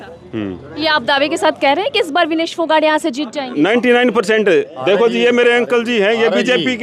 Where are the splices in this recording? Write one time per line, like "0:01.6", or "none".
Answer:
none

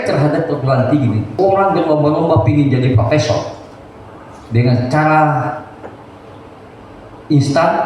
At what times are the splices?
0:01.3

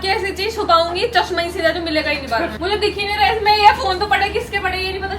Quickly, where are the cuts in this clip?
0:02.5

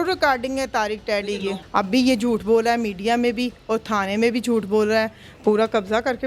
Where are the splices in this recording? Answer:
0:01.6
0:05.2

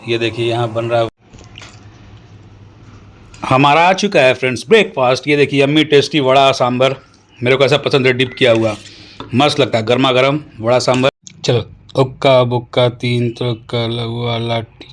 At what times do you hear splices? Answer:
0:01.1
0:11.1

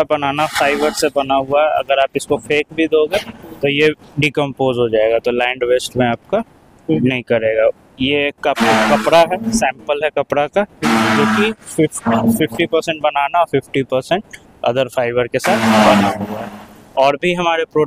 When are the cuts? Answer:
none

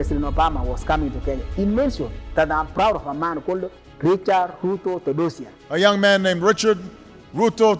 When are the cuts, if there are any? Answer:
none

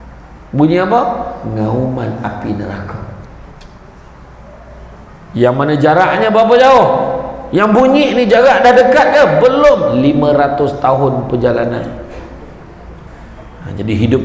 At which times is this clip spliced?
0:13.1

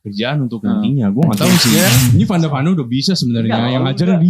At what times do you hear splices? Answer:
0:02.0

